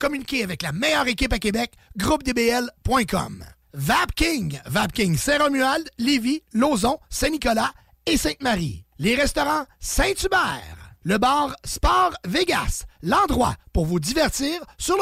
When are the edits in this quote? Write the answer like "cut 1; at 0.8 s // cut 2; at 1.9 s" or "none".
none

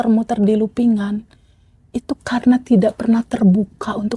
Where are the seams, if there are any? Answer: none

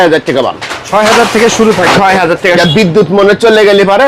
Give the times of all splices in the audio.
cut 1; at 2.6 s

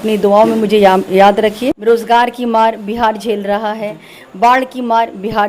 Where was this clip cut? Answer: cut 1; at 1.8 s

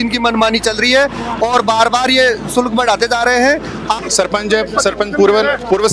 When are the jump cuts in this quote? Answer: cut 1; at 4.0 s

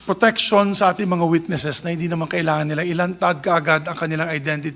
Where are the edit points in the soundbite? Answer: none

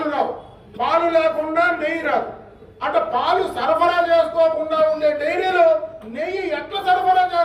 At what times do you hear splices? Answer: none

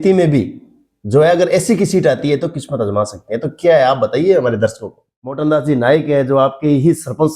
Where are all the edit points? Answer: cut 1; at 5.4 s

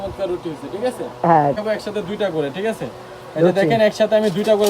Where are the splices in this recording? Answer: cut 1; at 1.6 s

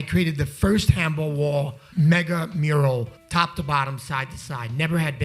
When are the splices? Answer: cut 1; at 1.8 s // cut 2; at 3.2 s

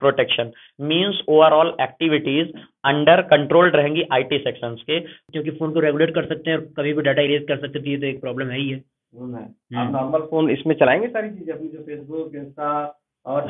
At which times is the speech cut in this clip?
cut 1; at 5.1 s

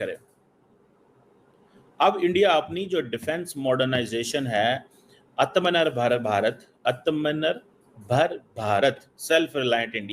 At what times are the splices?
none

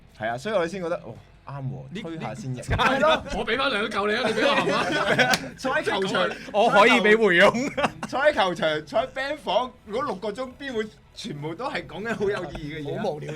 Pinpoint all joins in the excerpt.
cut 1; at 2.6 s

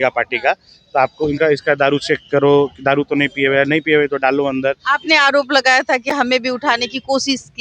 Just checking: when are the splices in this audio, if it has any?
none

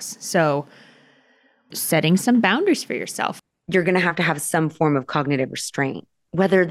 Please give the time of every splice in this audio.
cut 1; at 1.7 s // cut 2; at 3.3 s

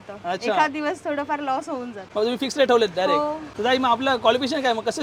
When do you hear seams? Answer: none

